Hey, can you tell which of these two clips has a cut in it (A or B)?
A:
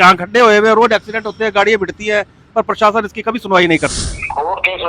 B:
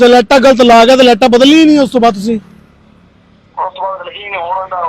A